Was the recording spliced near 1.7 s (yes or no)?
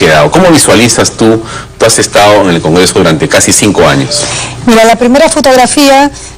yes